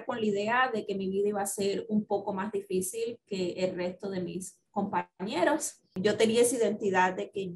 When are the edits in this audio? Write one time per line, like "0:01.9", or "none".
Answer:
0:06.0